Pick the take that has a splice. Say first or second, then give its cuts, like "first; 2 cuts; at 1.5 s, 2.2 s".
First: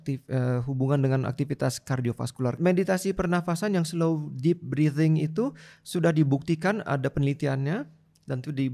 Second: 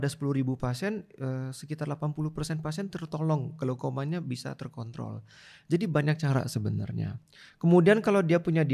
first; 1 cut; at 2.6 s